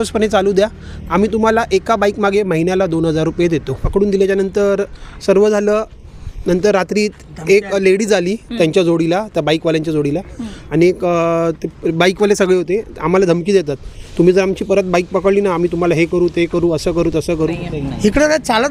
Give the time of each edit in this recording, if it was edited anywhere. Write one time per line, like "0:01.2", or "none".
0:03.8
0:17.7